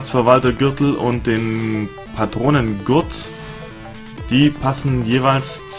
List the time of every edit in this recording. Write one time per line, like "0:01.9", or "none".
none

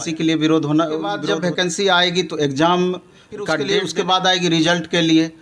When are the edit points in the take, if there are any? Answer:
0:01.2
0:03.6

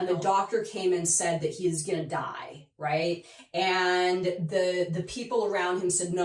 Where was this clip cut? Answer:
none

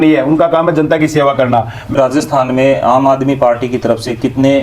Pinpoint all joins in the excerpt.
0:01.9

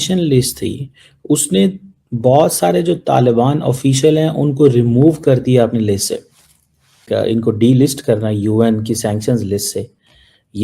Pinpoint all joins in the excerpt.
0:07.1

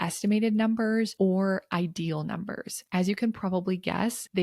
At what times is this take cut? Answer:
0:02.9

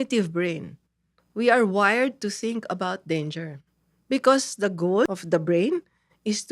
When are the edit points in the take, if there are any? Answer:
0:05.1

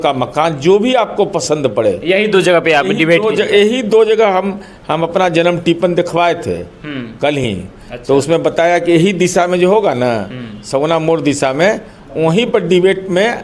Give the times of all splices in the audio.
none

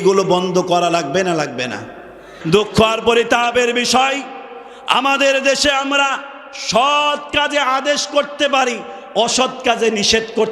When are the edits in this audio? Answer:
0:02.3

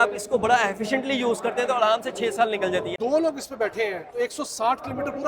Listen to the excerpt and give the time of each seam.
0:03.0

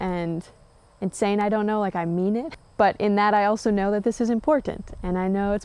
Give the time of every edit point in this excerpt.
0:02.6

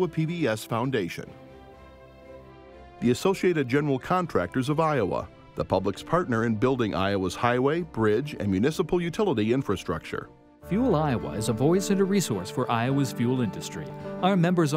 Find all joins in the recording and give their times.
0:01.3
0:03.0

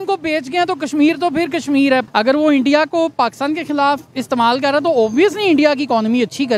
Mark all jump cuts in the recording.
0:02.0

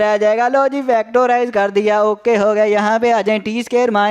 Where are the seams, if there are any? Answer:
none

